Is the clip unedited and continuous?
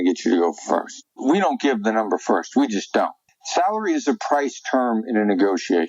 no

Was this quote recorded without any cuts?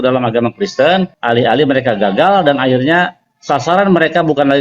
no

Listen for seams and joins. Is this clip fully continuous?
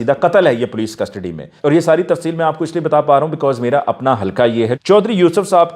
no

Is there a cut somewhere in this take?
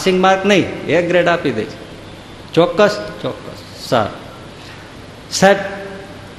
no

